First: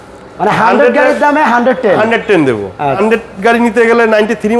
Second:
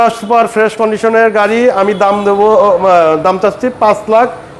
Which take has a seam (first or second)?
first